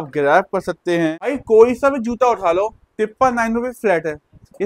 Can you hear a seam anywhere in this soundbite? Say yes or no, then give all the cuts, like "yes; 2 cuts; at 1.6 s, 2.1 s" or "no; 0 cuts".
yes; 1 cut; at 1.4 s